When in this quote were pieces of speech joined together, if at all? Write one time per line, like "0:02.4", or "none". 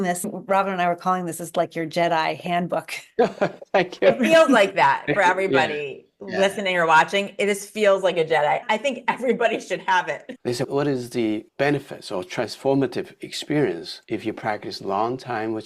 0:08.6
0:10.4